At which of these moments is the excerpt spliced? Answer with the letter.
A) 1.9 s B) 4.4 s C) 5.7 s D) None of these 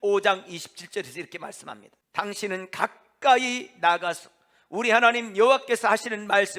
A